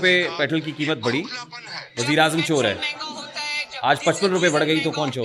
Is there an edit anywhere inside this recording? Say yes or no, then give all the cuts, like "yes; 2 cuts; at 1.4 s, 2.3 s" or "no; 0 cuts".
no; 0 cuts